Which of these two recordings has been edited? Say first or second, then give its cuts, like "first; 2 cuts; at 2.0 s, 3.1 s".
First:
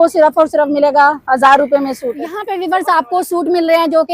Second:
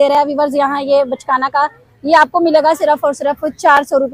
first; 1 cut; at 2.4 s